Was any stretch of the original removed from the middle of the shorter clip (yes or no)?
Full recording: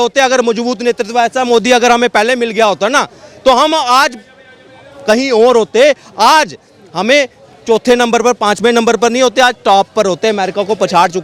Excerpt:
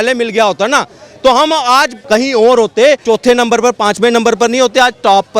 yes